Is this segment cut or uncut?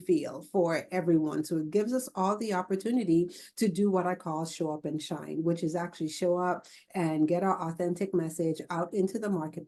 uncut